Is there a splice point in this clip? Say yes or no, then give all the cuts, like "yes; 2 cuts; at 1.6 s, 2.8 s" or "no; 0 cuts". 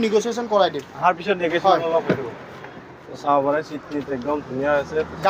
no; 0 cuts